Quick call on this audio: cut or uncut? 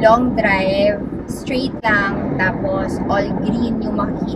uncut